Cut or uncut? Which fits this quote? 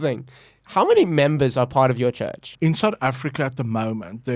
cut